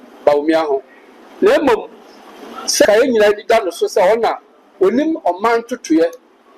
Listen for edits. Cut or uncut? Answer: cut